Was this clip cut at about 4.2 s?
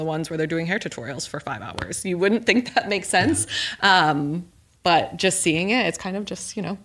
no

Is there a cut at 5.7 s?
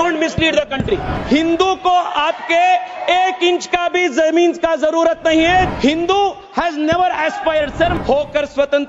yes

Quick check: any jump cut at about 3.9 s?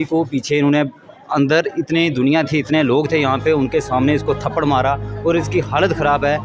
no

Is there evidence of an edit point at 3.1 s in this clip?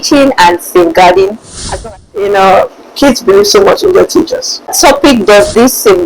no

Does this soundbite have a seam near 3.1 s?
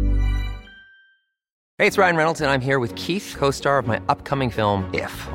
no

